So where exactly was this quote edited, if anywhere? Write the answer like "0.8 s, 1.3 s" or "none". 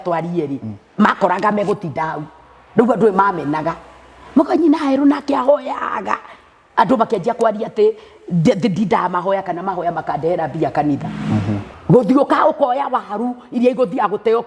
11.7 s